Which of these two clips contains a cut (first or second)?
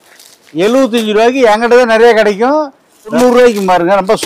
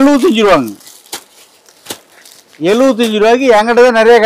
first